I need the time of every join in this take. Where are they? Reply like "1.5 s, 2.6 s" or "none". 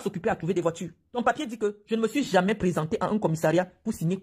1.2 s